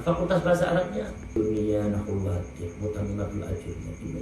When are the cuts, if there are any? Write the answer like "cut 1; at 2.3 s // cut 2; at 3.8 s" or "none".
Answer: cut 1; at 1.3 s